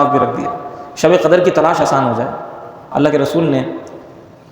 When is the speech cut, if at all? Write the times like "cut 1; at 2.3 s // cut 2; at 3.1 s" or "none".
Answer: cut 1; at 2.8 s

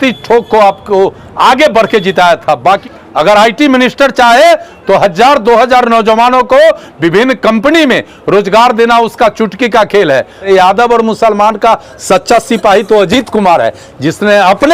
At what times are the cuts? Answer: cut 1; at 2.8 s // cut 2; at 10.5 s

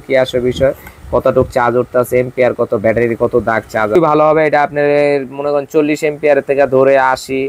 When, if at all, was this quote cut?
cut 1; at 4.0 s

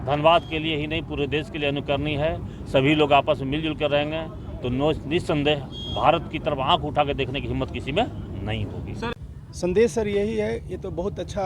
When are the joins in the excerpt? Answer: cut 1; at 9.1 s

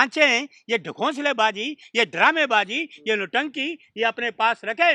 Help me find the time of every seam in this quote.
none

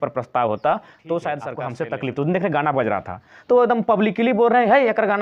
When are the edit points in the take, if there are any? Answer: cut 1; at 1.6 s

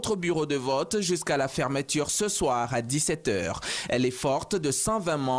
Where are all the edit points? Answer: none

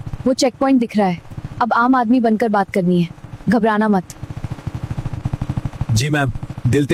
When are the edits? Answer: none

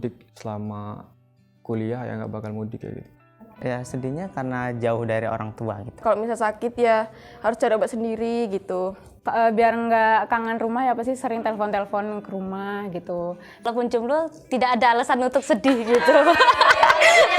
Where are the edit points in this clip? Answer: cut 1; at 3.5 s // cut 2; at 6.0 s // cut 3; at 9.1 s // cut 4; at 13.5 s

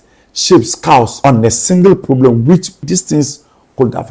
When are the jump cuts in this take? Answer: cut 1; at 1.1 s // cut 2; at 2.8 s

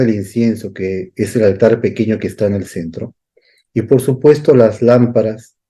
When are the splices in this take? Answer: none

